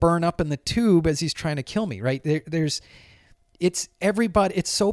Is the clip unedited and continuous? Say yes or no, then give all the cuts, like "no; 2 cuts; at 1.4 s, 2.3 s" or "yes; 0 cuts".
yes; 0 cuts